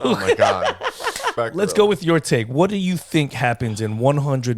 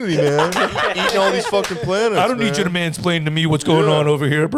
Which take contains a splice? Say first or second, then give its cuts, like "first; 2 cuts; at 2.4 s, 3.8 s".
first; 1 cut; at 1.3 s